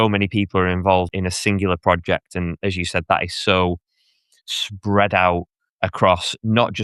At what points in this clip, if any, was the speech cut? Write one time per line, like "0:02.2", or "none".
0:01.1